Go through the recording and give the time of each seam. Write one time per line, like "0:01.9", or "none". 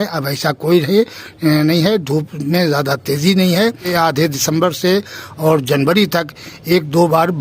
0:03.9